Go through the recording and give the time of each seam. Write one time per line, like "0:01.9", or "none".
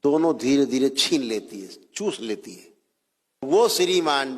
0:03.5